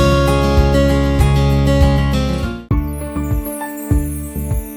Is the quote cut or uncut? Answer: cut